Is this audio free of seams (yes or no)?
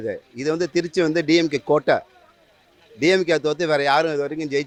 yes